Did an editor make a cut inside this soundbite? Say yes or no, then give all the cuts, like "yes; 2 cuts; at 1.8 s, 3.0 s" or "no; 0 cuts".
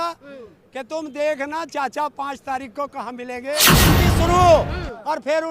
yes; 1 cut; at 3.8 s